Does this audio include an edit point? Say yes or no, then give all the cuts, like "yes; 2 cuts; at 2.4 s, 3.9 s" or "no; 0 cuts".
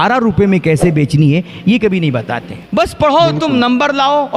yes; 1 cut; at 2.6 s